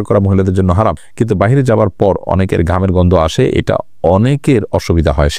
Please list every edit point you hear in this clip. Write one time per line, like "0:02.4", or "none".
0:01.0